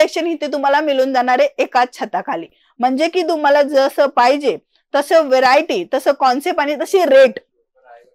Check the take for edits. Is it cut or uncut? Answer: uncut